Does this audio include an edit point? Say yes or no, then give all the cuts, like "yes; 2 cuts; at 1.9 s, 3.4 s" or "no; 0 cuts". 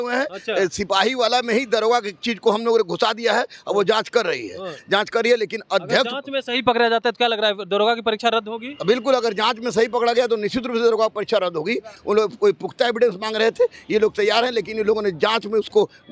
yes; 1 cut; at 11.9 s